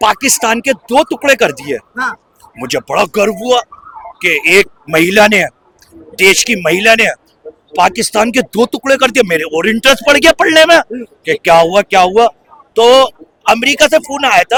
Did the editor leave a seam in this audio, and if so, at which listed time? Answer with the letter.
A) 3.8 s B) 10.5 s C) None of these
C